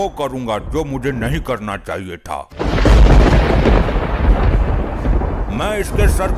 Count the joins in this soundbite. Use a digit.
1